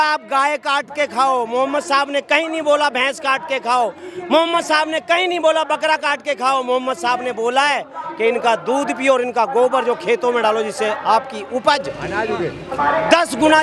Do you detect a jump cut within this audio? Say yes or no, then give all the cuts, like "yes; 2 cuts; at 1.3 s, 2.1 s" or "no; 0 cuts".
no; 0 cuts